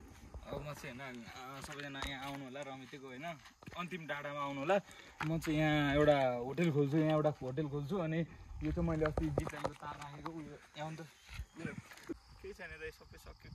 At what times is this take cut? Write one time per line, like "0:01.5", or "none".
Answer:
0:12.1